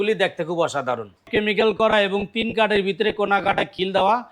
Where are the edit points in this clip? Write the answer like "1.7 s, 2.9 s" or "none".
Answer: 1.3 s